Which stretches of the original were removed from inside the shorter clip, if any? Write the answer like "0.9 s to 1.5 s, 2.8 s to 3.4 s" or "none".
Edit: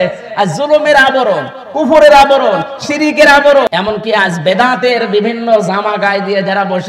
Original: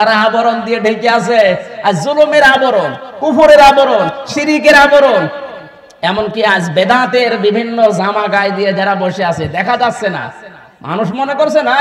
5.1 s to 6.0 s

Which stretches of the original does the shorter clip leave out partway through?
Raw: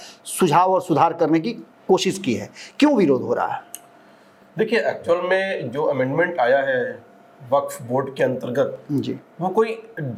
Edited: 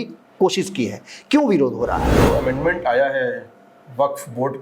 3.6 s to 5.7 s

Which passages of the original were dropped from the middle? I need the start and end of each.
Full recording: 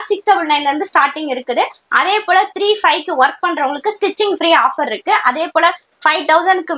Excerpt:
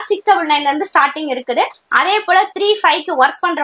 none

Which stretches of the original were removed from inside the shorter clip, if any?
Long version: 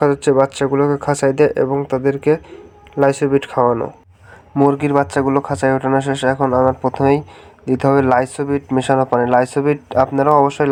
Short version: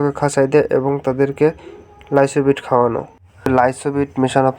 4.3 s to 8.0 s

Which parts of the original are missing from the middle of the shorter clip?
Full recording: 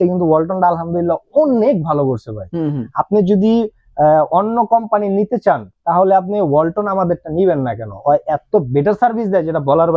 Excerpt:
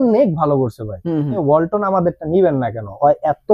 2.9 s to 6.4 s

